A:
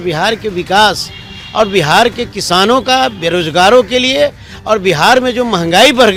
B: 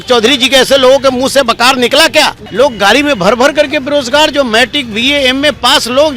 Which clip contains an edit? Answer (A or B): B